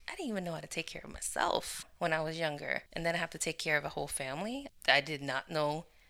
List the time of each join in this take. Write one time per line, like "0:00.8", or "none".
0:01.8
0:02.9
0:04.7